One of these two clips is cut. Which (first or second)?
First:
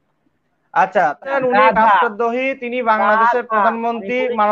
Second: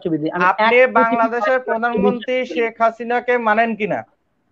first